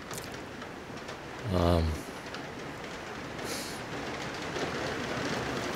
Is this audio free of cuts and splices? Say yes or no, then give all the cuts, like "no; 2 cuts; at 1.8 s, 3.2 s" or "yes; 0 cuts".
no; 1 cut; at 2.8 s